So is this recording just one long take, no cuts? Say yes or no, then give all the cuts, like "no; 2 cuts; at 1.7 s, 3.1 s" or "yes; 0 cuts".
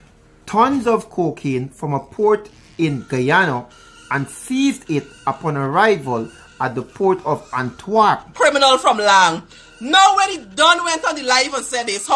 no; 1 cut; at 8.3 s